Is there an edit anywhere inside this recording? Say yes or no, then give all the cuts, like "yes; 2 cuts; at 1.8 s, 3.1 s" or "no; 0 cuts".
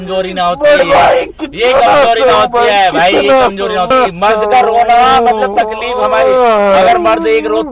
yes; 1 cut; at 3.9 s